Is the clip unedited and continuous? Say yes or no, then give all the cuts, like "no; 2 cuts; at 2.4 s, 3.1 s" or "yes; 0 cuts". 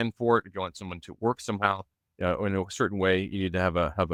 yes; 0 cuts